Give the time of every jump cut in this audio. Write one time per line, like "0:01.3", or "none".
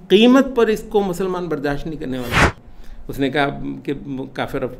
0:02.5